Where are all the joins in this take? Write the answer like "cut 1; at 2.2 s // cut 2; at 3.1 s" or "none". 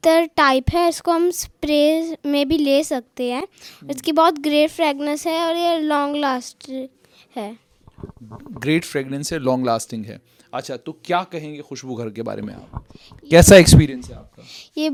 none